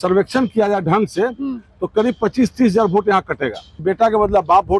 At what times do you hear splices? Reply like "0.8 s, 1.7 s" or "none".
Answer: 3.7 s